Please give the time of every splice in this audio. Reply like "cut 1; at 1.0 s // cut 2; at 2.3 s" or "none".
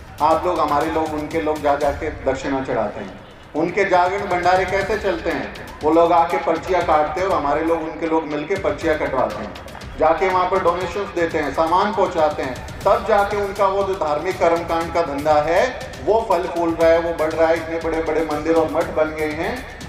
none

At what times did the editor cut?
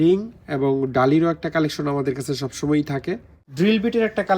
cut 1; at 3.4 s

